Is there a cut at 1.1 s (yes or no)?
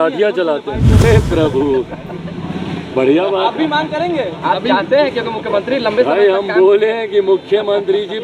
yes